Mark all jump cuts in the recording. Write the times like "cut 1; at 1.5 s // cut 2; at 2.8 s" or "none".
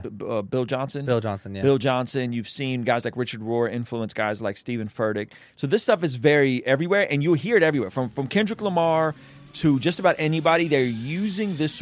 none